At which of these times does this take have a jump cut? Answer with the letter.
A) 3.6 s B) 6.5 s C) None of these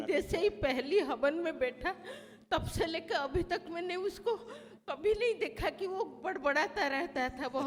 C